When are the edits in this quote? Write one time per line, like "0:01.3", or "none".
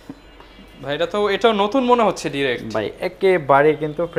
none